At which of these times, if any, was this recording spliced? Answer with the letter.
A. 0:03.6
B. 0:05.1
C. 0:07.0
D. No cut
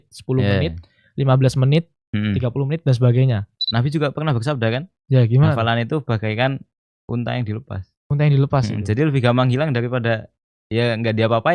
A